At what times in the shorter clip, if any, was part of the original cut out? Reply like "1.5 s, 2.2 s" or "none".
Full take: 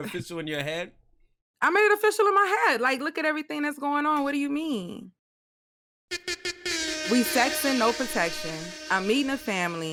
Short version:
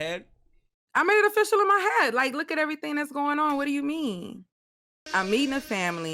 4.9 s